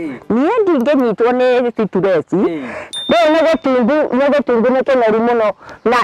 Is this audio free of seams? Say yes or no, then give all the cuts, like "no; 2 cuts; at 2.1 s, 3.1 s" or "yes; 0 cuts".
no; 1 cut; at 2.8 s